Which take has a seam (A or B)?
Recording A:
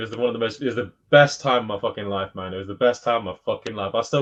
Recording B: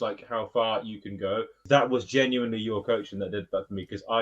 B